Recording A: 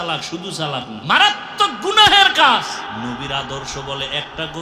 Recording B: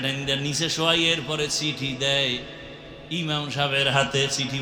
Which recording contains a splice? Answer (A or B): A